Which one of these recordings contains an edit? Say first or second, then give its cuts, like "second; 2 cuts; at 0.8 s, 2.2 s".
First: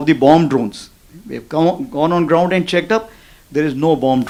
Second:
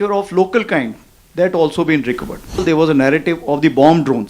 second; 1 cut; at 2.6 s